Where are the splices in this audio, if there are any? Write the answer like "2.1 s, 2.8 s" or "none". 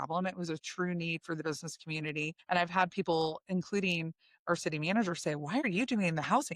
2.4 s, 5.6 s